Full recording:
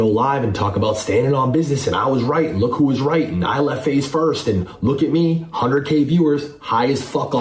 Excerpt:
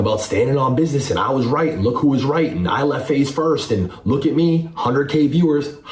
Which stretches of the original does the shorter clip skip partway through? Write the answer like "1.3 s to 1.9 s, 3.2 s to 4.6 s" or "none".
none